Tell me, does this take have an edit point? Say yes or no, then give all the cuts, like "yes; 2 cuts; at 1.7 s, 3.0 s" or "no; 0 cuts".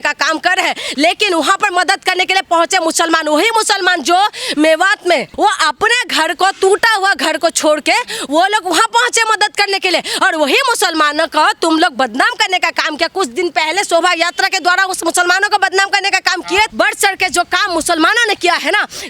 yes; 2 cuts; at 0.8 s, 16.7 s